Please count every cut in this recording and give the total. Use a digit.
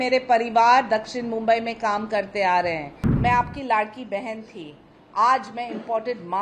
1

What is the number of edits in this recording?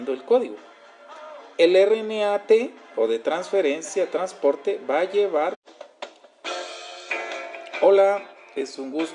0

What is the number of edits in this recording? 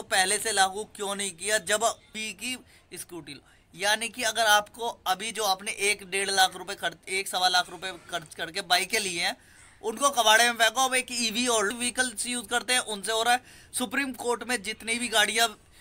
2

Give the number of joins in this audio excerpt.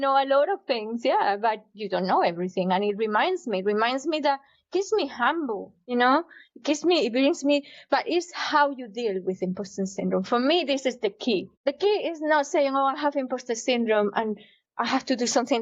2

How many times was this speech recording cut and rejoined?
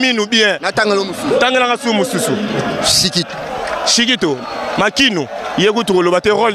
0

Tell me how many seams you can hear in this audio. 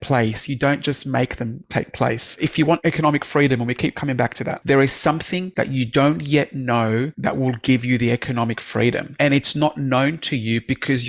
5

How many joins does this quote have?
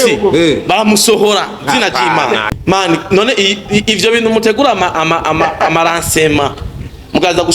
1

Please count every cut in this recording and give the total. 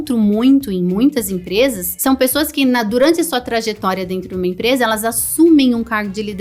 1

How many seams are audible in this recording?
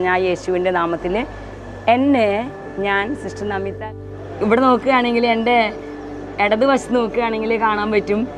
1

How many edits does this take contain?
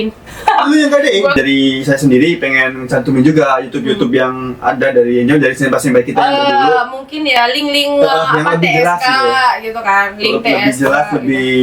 1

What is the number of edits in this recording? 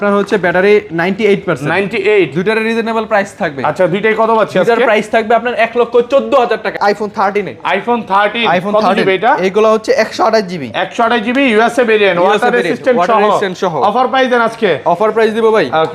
1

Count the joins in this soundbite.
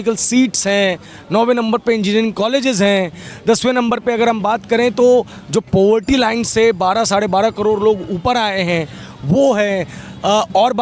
0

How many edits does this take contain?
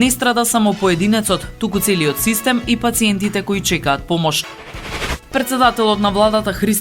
1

